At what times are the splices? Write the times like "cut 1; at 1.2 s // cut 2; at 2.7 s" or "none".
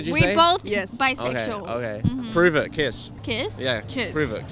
cut 1; at 3.1 s